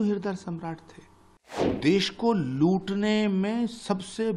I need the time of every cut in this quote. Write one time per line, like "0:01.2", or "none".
0:01.8